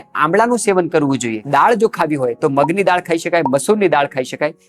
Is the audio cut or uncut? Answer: cut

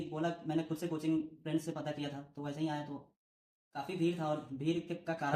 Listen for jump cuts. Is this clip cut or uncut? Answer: uncut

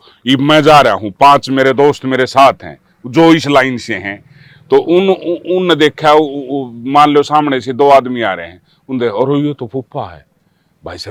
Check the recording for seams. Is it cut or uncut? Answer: uncut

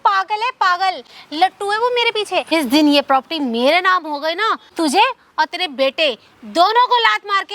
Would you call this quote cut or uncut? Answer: cut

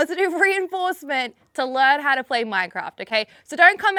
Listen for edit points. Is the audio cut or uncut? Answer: uncut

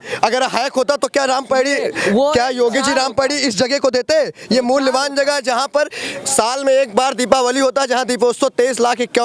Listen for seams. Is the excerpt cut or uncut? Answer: uncut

